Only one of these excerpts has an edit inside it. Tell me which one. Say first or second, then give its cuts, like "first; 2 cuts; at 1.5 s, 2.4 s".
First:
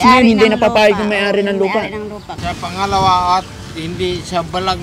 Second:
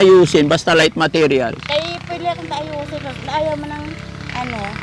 first; 1 cut; at 2.3 s